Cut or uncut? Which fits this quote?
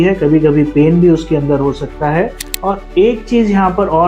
cut